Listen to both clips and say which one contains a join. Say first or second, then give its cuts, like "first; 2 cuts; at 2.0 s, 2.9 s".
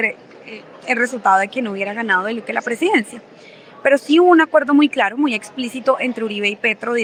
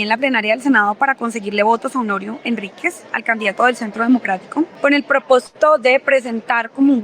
second; 1 cut; at 4.7 s